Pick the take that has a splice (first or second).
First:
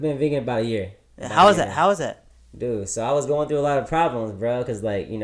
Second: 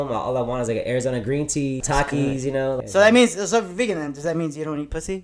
second